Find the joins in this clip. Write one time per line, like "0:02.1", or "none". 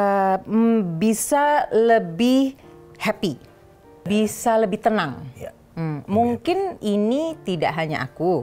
0:04.0